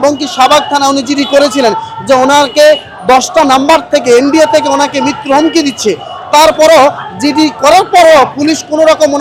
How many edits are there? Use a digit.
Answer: 0